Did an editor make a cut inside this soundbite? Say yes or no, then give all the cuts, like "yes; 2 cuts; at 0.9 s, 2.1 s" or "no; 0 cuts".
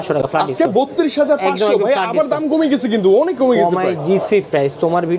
no; 0 cuts